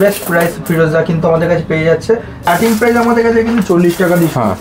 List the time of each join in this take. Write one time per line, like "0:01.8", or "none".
0:02.5